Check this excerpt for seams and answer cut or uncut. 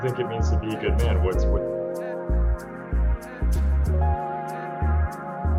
uncut